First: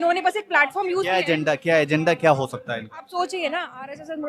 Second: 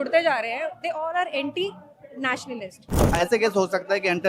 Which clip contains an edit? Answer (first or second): second